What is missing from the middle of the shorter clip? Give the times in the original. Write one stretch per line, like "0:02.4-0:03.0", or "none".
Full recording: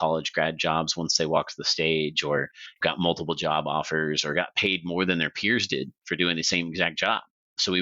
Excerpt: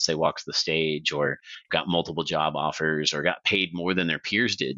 none